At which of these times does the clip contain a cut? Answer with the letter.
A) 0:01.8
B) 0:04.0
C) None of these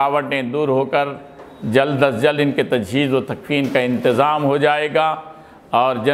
C